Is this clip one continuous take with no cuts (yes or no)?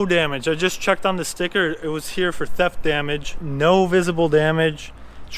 no